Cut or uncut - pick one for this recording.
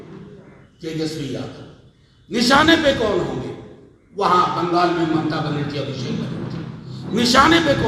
uncut